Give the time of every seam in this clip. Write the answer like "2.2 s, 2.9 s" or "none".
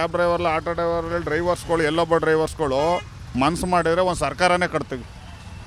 none

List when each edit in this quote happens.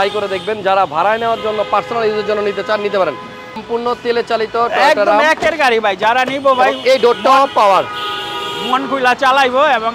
3.6 s

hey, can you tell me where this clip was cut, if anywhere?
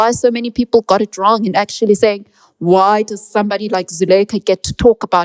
none

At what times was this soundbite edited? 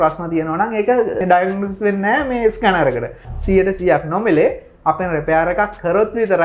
1.2 s, 3.2 s

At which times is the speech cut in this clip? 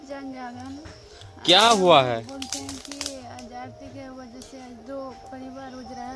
none

